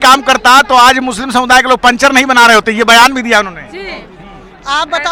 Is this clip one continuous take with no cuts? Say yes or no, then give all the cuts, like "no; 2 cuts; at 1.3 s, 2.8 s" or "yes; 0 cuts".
yes; 0 cuts